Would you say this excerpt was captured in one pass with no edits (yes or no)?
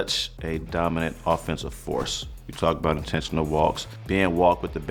yes